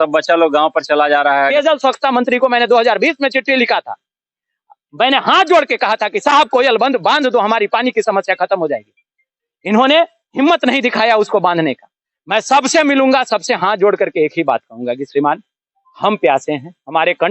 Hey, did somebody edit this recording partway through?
yes; 1 cut; at 1.5 s

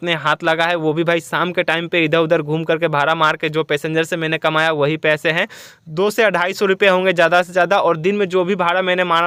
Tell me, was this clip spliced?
no; 0 cuts

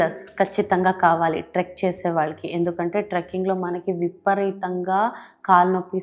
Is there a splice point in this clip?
no; 0 cuts

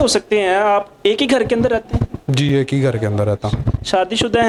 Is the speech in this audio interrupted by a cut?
no; 0 cuts

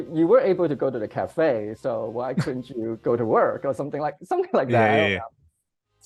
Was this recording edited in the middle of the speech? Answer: no; 0 cuts

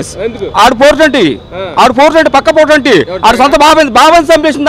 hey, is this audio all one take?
yes; 0 cuts

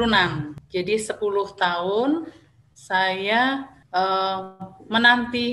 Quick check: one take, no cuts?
no; 2 cuts; at 1.1 s, 3.8 s

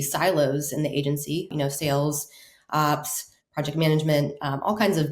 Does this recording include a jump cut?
yes; 1 cut; at 1.5 s

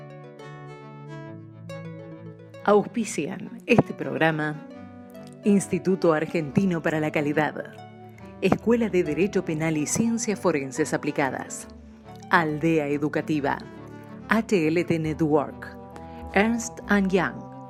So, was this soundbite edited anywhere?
no; 0 cuts

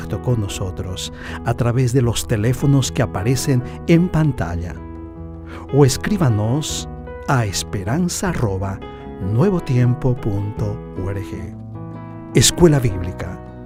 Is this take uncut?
yes; 0 cuts

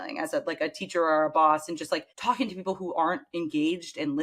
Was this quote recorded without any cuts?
no; 1 cut; at 2.1 s

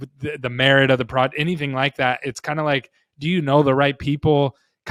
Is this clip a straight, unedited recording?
yes; 0 cuts

